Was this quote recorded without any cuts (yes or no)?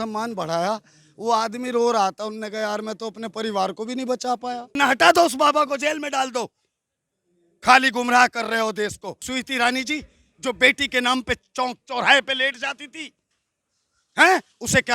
no